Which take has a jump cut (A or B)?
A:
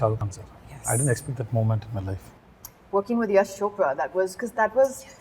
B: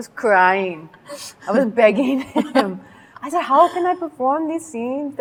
A